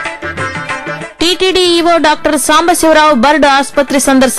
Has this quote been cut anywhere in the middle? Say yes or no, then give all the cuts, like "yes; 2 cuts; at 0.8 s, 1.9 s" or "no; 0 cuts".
yes; 1 cut; at 1.0 s